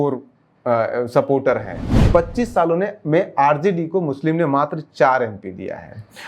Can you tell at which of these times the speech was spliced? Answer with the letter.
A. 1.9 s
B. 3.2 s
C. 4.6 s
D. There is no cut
A